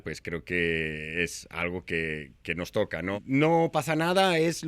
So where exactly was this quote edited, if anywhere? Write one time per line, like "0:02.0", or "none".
0:03.2